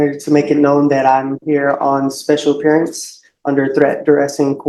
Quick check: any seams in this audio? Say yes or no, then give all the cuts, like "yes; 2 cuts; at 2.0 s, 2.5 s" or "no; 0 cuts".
no; 0 cuts